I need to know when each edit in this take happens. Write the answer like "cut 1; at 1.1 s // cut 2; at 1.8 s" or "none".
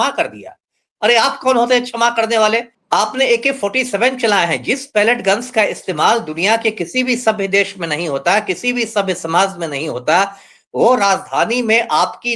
cut 1; at 2.7 s

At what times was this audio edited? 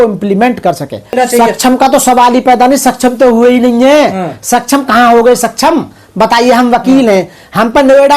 cut 1; at 1.2 s

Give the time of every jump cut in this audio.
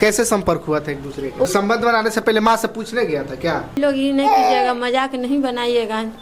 cut 1; at 1.5 s // cut 2; at 3.7 s

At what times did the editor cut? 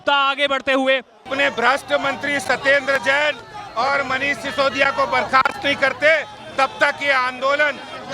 cut 1; at 1.3 s

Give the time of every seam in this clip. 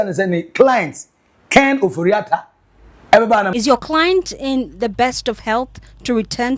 cut 1; at 3.5 s

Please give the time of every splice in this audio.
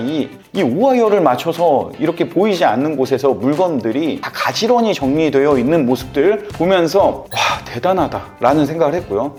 none

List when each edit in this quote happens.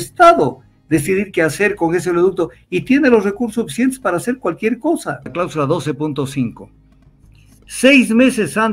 cut 1; at 5.3 s

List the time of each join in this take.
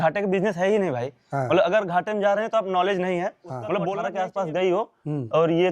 cut 1; at 4.2 s

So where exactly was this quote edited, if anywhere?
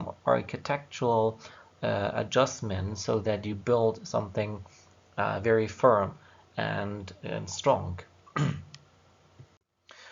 cut 1; at 2.6 s

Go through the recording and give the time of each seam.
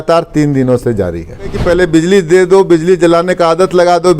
cut 1; at 1.6 s

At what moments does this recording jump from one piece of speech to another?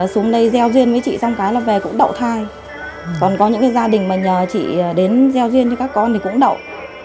none

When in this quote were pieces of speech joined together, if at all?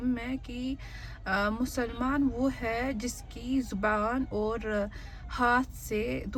none

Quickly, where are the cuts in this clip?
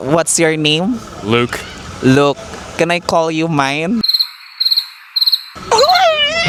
none

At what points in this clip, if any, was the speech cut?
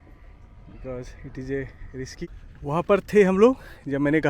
cut 1; at 2.2 s

